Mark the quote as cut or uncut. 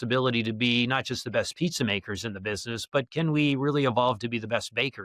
uncut